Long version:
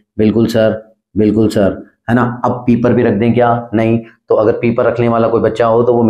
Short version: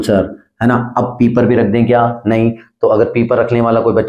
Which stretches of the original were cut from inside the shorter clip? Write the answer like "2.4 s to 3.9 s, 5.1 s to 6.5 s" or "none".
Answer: none